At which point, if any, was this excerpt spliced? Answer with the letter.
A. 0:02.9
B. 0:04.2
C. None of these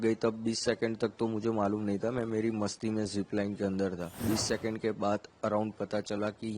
B